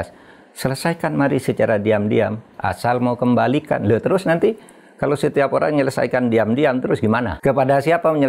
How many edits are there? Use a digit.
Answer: 1